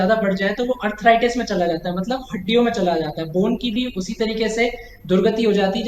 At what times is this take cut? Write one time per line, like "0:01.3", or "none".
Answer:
none